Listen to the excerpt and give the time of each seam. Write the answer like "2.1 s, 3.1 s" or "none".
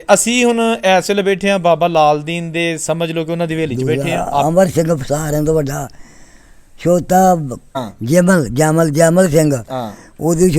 4.4 s